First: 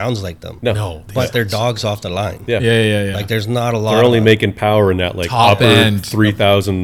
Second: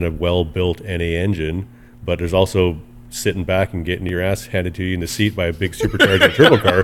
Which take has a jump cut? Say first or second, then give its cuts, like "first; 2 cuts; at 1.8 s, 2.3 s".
second; 1 cut; at 4.1 s